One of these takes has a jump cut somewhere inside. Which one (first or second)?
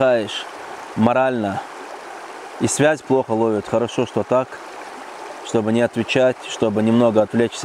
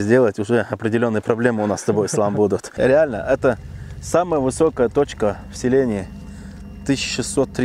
second